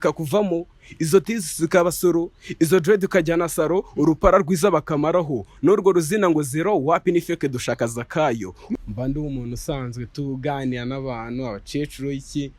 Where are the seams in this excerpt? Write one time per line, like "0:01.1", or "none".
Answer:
0:08.8